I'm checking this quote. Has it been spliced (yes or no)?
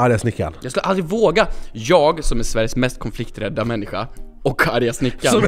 no